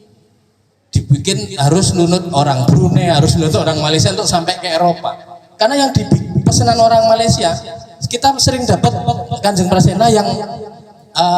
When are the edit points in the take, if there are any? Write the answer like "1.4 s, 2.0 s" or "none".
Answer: none

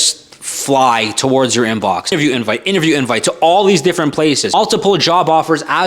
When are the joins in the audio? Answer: 2.1 s, 4.5 s

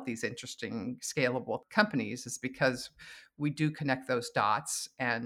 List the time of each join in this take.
1.6 s

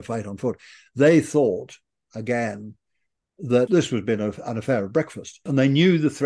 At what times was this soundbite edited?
3.7 s, 5.5 s

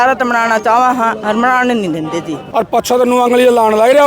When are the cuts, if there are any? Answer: 2.4 s

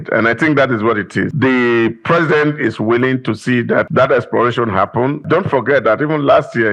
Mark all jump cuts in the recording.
1.3 s, 3.9 s, 5.2 s

